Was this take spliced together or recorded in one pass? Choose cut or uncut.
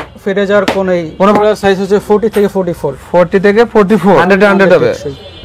cut